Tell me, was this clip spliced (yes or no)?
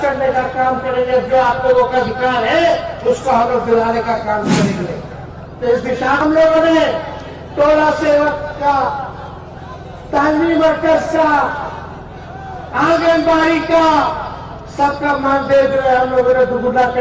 yes